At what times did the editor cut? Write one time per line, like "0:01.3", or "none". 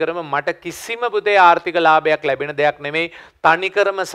none

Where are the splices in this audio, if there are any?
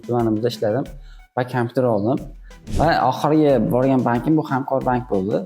0:02.6

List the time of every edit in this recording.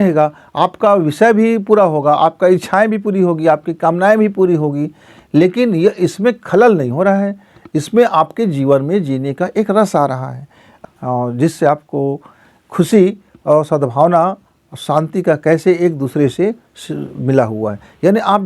0:10.7

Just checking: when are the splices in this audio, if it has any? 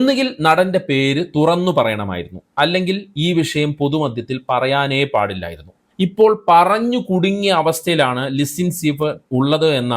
0:05.8

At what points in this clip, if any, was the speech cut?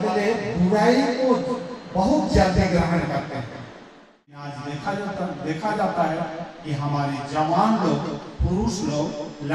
0:04.5

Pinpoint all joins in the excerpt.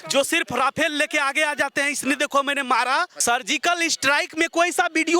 0:03.1

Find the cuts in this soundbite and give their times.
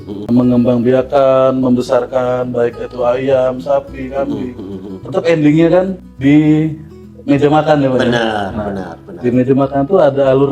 0:06.0

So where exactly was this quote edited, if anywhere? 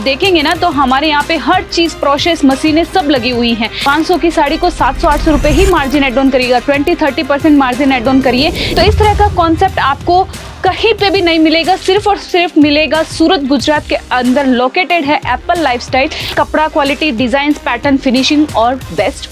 0:03.7
0:08.6
0:16.3

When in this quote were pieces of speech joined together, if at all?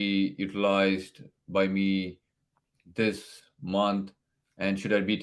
none

